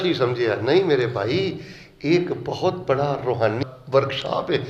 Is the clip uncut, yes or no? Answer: no